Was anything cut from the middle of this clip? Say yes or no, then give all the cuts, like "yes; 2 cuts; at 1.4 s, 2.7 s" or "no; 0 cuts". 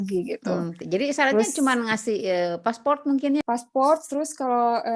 yes; 1 cut; at 3.4 s